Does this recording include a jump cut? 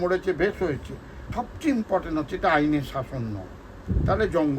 yes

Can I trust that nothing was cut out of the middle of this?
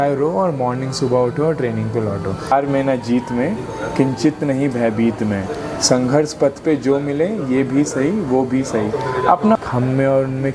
no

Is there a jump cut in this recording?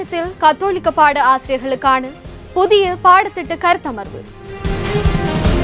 yes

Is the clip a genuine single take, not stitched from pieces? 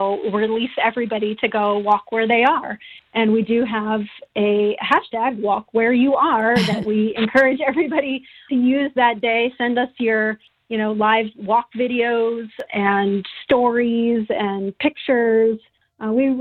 no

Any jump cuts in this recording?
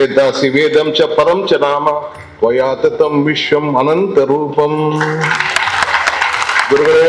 no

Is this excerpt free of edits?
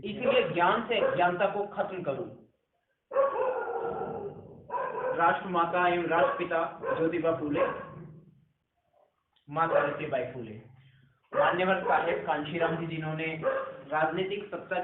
yes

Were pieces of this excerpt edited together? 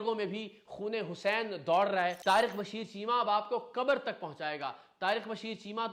yes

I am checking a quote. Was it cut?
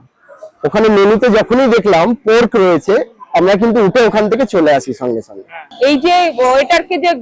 yes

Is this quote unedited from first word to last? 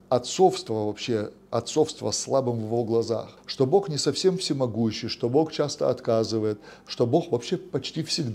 no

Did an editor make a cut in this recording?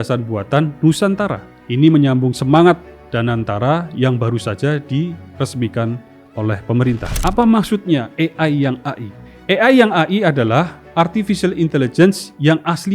yes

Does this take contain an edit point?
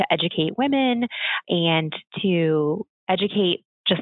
yes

